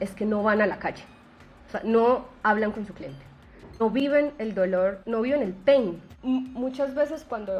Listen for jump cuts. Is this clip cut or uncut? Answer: cut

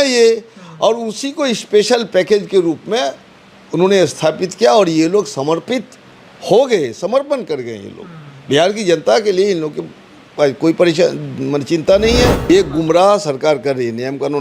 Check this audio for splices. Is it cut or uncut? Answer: cut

